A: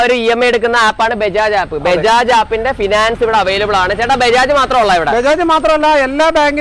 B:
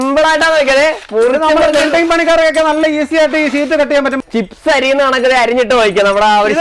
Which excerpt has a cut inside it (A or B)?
B